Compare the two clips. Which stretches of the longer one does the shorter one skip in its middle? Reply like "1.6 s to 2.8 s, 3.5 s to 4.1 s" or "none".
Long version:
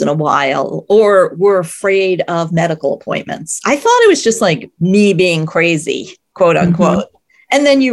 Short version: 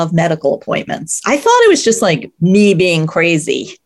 none